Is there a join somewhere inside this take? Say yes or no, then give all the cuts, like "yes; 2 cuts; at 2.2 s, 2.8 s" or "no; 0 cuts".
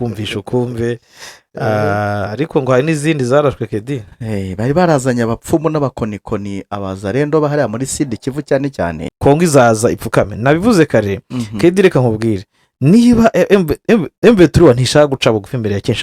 yes; 1 cut; at 9.0 s